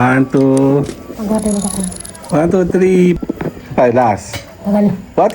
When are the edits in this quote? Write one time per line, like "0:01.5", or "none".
0:03.2